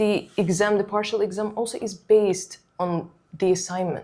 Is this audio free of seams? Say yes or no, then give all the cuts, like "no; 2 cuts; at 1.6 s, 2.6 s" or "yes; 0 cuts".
yes; 0 cuts